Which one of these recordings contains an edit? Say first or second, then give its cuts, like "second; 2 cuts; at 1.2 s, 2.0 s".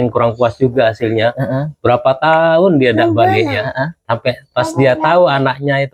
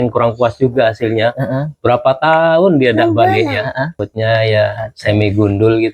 second; 1 cut; at 4.0 s